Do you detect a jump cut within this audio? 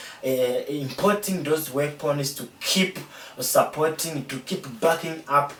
no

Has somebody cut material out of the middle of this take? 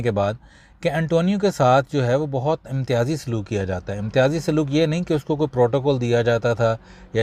no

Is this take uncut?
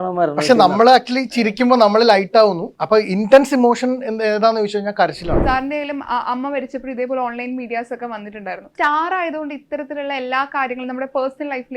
no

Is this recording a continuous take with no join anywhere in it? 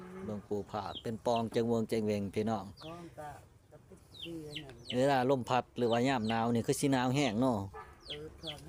yes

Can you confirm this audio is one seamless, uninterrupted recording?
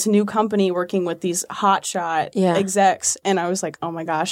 yes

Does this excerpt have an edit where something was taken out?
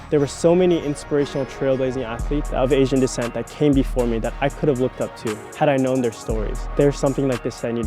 yes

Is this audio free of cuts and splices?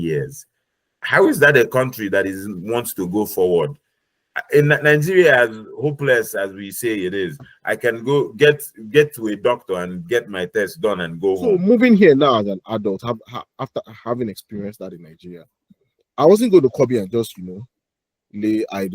no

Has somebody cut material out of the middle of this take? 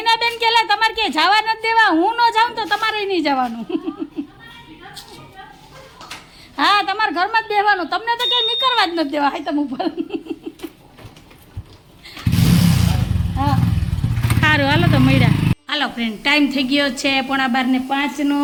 no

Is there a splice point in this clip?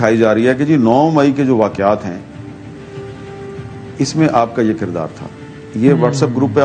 no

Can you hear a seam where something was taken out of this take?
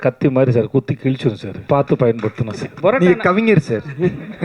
yes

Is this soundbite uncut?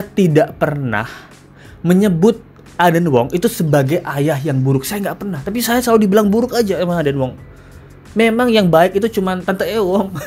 yes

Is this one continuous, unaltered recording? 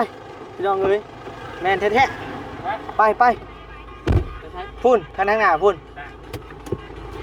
yes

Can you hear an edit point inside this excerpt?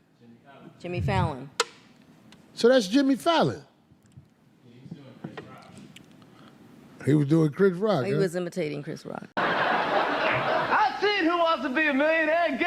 yes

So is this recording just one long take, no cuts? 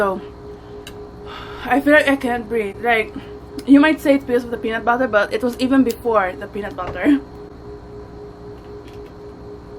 yes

